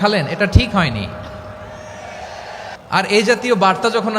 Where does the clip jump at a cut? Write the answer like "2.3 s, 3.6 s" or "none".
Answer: 2.8 s